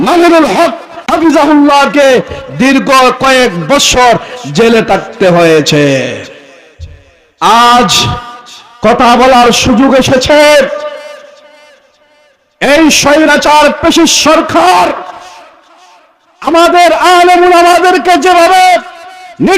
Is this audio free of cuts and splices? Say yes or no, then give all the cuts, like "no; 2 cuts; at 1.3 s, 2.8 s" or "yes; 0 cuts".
no; 1 cut; at 1.0 s